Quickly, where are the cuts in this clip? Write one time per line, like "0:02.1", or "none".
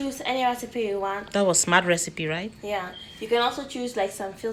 none